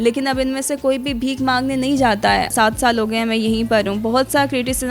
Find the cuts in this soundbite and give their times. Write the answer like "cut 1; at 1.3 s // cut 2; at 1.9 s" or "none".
cut 1; at 2.5 s